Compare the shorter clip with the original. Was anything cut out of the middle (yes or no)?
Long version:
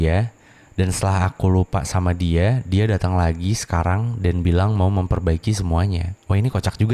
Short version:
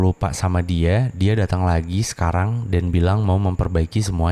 no